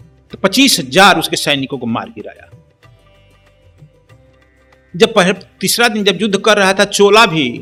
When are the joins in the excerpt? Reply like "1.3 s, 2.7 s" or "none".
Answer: none